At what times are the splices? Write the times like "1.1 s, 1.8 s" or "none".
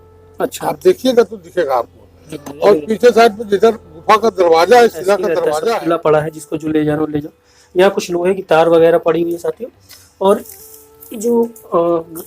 5.5 s